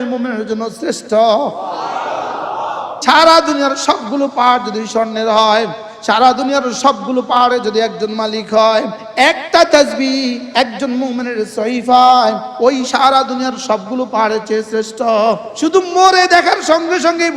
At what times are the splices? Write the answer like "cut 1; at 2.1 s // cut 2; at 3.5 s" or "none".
cut 1; at 3.0 s // cut 2; at 9.0 s // cut 3; at 12.5 s // cut 4; at 15.5 s